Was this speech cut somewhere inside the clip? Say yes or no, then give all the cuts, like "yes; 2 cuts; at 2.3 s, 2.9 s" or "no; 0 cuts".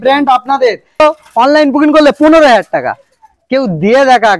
yes; 1 cut; at 1.0 s